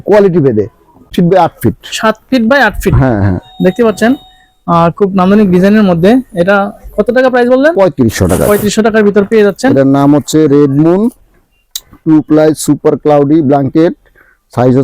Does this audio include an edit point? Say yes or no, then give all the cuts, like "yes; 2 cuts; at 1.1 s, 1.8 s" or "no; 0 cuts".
yes; 1 cut; at 1.1 s